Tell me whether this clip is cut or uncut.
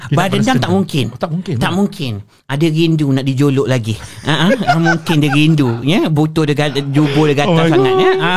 uncut